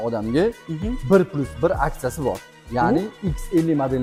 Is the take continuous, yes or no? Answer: yes